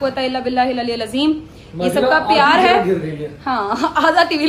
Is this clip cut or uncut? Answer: uncut